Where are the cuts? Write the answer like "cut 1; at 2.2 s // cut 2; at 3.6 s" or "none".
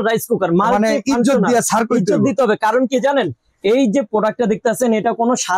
none